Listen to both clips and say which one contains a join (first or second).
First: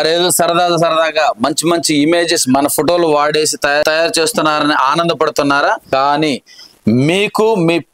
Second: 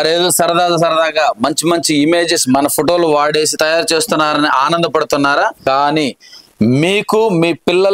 second